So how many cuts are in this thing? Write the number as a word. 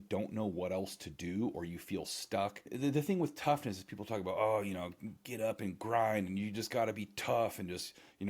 one